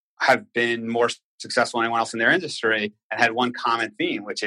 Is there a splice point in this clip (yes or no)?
no